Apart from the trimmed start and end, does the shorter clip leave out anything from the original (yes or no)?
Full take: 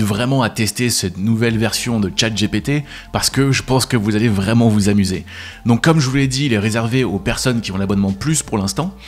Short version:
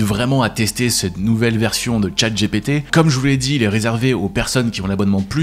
yes